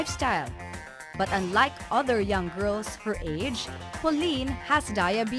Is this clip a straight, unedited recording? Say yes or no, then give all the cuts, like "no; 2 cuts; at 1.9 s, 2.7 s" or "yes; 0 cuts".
no; 1 cut; at 1.9 s